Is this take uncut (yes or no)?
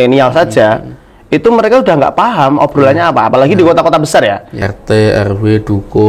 no